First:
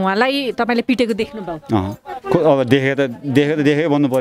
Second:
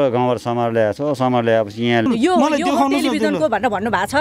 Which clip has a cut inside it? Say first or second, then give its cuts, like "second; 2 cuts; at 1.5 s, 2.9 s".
second; 1 cut; at 2.1 s